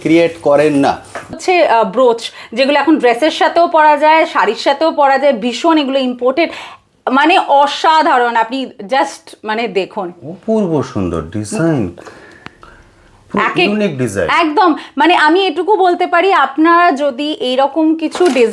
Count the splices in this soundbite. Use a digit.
1